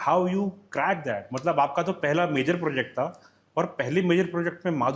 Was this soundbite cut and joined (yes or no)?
no